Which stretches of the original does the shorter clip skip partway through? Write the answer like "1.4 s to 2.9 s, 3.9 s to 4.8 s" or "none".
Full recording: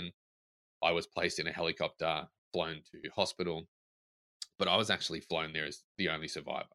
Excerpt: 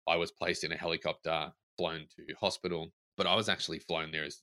3.7 s to 4.4 s